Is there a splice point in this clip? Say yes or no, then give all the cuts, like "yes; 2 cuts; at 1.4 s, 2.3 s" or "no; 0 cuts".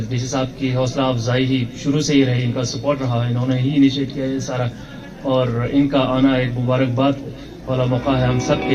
no; 0 cuts